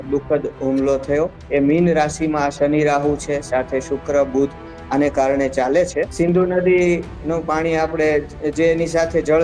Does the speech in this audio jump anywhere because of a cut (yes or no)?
yes